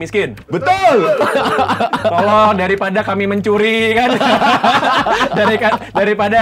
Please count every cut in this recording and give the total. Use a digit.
0